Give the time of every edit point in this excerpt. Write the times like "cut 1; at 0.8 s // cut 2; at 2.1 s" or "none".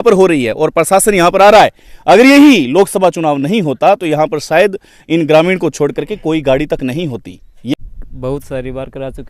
none